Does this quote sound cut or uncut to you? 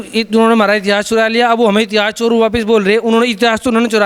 uncut